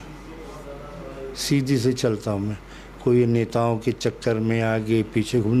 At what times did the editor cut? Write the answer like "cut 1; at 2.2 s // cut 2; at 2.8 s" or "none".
none